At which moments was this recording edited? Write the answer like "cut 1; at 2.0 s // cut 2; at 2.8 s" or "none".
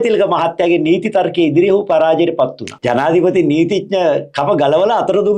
cut 1; at 2.7 s